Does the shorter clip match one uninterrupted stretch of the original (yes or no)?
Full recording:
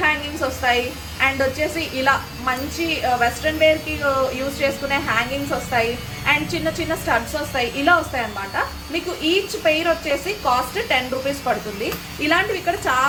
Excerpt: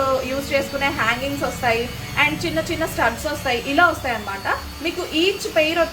yes